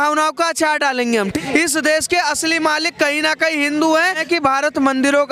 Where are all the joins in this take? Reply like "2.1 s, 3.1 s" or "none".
1.3 s, 4.2 s

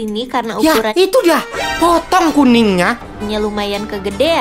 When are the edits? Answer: 3.0 s

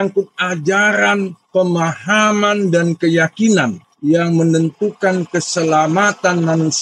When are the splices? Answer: 1.4 s, 3.9 s

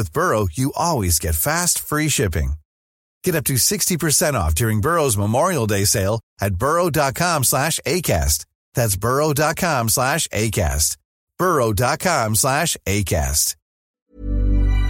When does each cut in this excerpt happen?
none

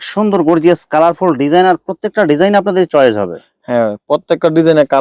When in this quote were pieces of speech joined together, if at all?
none

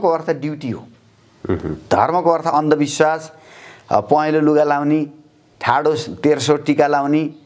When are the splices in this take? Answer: none

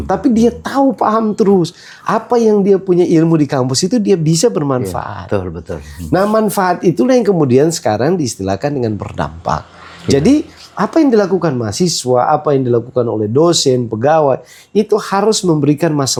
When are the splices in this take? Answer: none

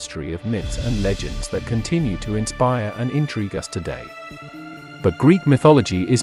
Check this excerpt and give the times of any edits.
none

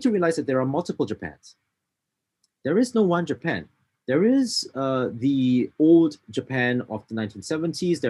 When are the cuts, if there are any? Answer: none

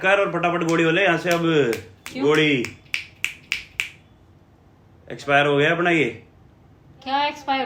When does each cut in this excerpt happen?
none

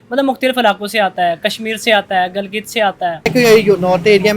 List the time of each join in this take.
3.3 s

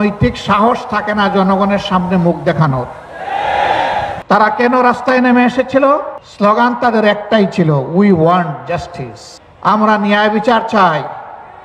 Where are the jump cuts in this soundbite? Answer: 4.2 s, 6.2 s

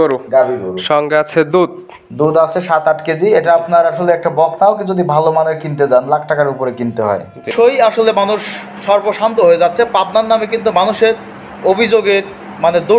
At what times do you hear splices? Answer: 7.5 s

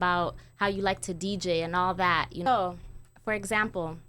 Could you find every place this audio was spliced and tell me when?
2.5 s

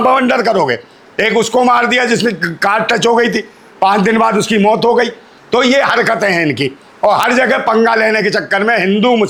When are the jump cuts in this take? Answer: none

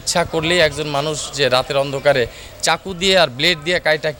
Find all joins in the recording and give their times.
none

